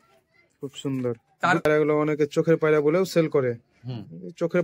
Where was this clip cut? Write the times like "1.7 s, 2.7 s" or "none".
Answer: 1.6 s